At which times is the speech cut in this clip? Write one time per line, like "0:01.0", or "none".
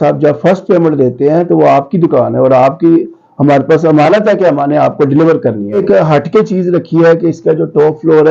0:05.8